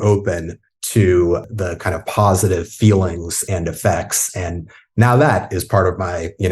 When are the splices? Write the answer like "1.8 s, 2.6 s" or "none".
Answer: 1.4 s, 3.4 s

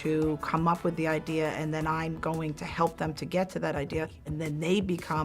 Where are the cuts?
4.3 s

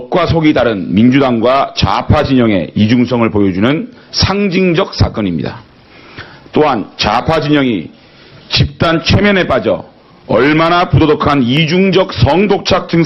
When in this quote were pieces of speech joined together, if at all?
5.8 s

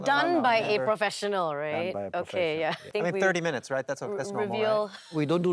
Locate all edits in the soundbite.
2.9 s

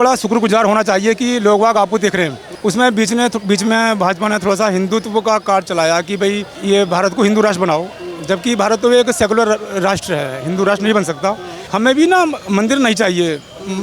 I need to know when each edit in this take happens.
2.4 s, 6.5 s, 11.6 s

